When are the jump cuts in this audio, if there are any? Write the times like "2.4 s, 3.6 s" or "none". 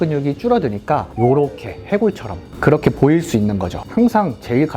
1.1 s, 3.8 s